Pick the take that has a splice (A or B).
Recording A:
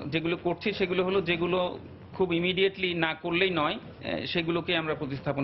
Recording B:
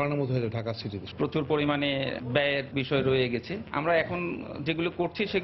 B